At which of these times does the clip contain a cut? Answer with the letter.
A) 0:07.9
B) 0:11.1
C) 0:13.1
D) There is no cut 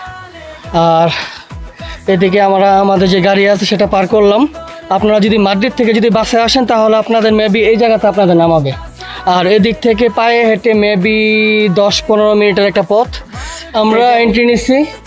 C